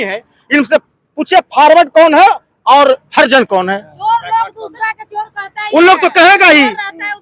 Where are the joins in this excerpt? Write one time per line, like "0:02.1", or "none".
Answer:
none